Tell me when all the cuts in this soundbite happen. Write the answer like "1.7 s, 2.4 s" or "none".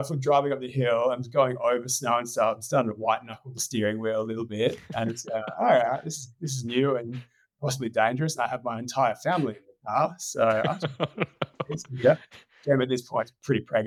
none